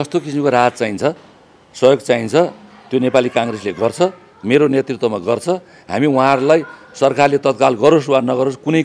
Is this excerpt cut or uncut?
uncut